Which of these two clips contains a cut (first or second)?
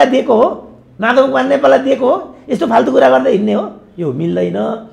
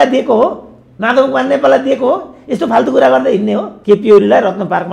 second